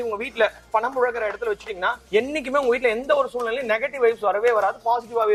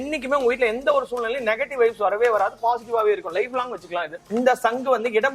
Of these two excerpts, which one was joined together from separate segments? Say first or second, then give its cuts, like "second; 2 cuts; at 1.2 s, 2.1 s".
second; 1 cut; at 4.2 s